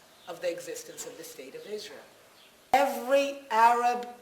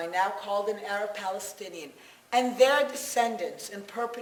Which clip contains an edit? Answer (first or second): first